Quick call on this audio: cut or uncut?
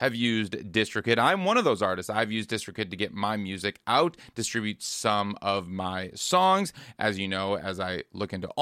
uncut